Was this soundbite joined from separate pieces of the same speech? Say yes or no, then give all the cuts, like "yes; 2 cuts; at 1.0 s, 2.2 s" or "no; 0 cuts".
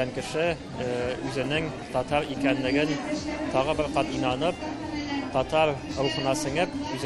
no; 0 cuts